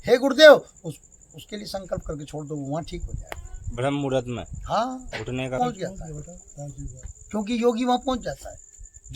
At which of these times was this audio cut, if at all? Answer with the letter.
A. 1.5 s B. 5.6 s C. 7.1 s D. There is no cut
B